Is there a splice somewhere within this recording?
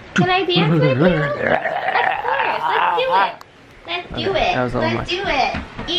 no; 0 cuts

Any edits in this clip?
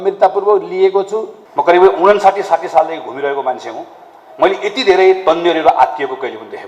yes; 1 cut; at 1.4 s

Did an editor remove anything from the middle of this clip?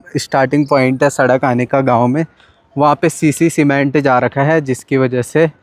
no; 0 cuts

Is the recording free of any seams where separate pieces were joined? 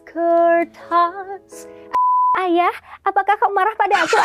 no; 1 cut; at 2.0 s

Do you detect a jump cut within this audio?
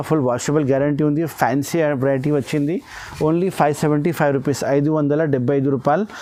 no; 0 cuts

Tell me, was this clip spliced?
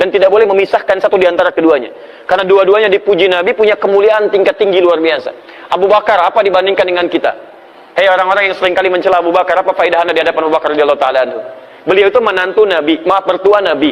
no; 0 cuts

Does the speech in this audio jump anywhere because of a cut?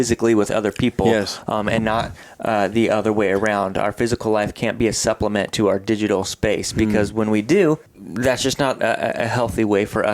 yes; 1 cut; at 8.0 s

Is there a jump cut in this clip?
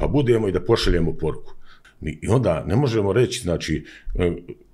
yes; 1 cut; at 1.8 s

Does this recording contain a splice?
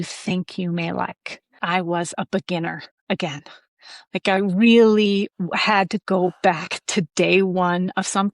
yes; 1 cut; at 1.6 s

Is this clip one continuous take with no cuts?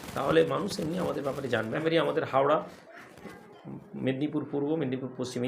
no; 1 cut; at 1.8 s

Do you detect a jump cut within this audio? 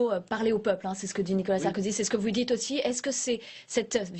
yes; 1 cut; at 0.9 s

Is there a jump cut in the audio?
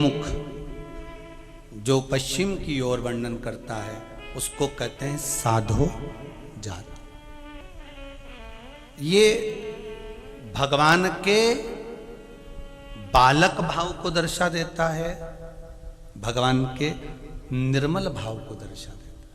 yes; 1 cut; at 7.6 s

